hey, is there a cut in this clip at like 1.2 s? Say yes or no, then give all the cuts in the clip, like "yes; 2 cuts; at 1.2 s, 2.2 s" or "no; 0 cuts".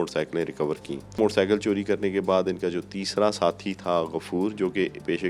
yes; 1 cut; at 1.2 s